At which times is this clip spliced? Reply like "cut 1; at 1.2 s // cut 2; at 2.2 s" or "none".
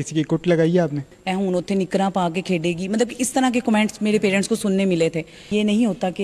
cut 1; at 1.1 s // cut 2; at 5.4 s